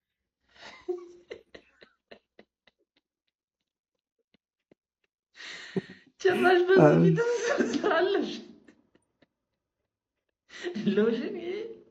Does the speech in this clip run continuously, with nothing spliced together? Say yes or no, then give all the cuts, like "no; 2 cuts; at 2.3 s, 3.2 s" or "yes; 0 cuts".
yes; 0 cuts